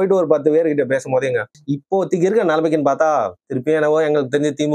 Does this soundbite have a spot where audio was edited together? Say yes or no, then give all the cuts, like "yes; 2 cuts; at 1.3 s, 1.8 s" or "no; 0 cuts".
yes; 1 cut; at 1.5 s